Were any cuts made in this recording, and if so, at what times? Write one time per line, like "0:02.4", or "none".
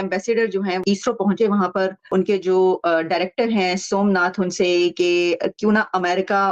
0:00.8
0:02.0